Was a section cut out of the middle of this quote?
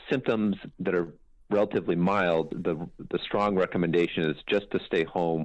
yes; 1 cut; at 2.5 s

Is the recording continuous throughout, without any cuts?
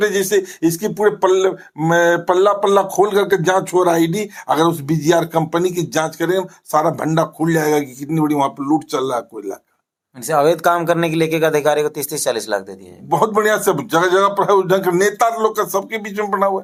yes; 0 cuts

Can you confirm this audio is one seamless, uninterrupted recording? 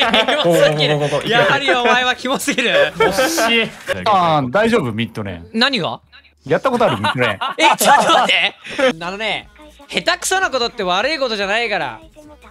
no; 2 cuts; at 3.8 s, 9.0 s

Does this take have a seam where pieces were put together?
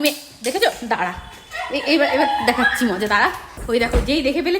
yes; 1 cut; at 3.5 s

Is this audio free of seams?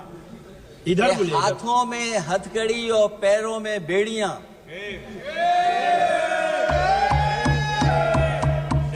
yes; 0 cuts

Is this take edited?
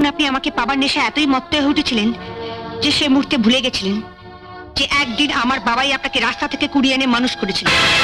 no; 0 cuts

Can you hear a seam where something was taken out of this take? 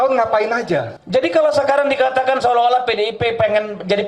yes; 1 cut; at 1.0 s

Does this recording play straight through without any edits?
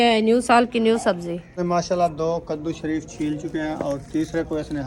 no; 1 cut; at 1.6 s

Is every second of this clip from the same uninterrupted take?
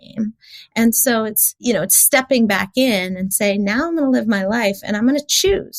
no; 1 cut; at 1.5 s

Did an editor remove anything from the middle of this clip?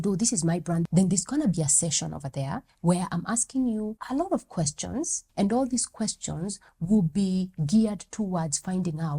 yes; 3 cuts; at 0.9 s, 4.0 s, 5.2 s

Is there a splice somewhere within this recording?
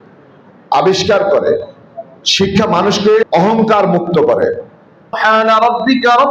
yes; 2 cuts; at 3.2 s, 5.2 s

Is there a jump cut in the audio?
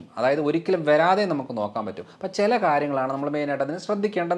no; 0 cuts

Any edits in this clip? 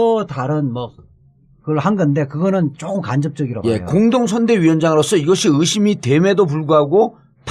yes; 1 cut; at 4.8 s

